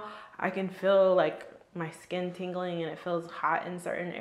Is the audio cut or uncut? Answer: uncut